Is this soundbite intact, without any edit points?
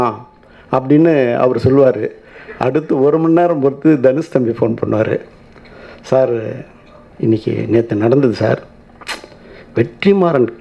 yes; 0 cuts

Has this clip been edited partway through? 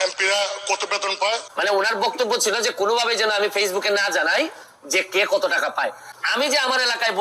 yes; 2 cuts; at 1.5 s, 6.1 s

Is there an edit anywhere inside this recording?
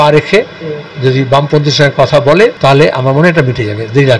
yes; 1 cut; at 2.6 s

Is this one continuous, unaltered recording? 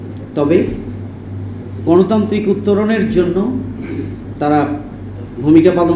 no; 1 cut; at 4.2 s

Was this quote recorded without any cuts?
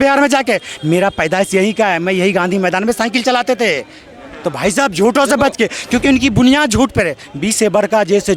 yes; 0 cuts

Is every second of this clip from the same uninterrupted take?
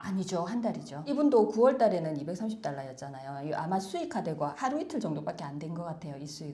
yes; 0 cuts

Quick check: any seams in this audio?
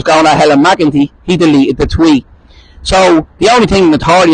no; 0 cuts

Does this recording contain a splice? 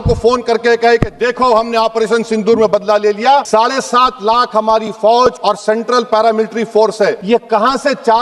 yes; 3 cuts; at 3.5 s, 5.4 s, 7.2 s

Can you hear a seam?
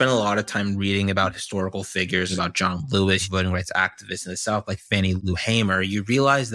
yes; 3 cuts; at 2.3 s, 3.3 s, 5.2 s

